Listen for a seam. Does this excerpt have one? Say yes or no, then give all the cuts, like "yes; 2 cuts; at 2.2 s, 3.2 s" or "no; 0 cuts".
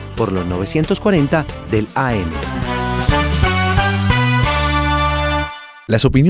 no; 0 cuts